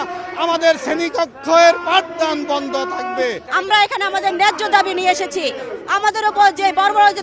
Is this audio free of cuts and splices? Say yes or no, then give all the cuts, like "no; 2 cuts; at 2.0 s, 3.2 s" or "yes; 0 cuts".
no; 1 cut; at 3.5 s